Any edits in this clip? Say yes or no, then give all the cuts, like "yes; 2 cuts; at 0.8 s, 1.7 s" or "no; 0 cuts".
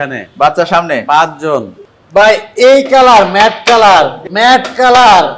yes; 2 cuts; at 1.8 s, 4.2 s